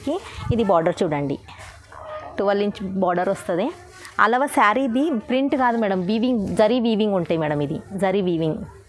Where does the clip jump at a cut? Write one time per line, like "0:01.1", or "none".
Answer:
none